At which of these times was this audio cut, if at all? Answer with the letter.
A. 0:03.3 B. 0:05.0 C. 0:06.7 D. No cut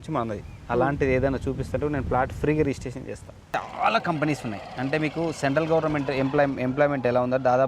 A